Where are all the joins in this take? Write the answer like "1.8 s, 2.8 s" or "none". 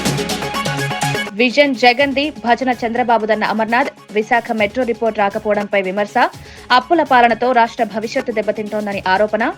1.2 s